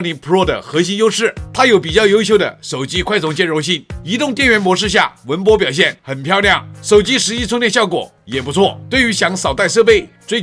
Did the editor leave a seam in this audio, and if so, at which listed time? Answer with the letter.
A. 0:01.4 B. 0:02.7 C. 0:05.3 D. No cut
A